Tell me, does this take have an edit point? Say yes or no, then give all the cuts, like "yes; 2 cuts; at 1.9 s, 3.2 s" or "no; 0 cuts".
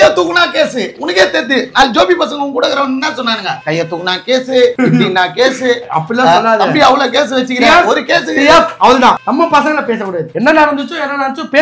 no; 0 cuts